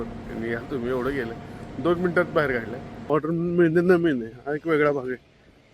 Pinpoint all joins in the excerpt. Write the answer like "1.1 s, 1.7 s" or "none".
2.9 s